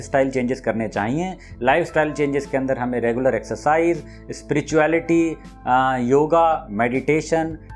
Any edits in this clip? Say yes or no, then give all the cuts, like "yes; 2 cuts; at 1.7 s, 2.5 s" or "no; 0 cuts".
no; 0 cuts